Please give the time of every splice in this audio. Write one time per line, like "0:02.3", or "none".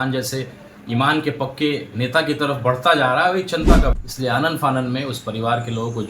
0:04.0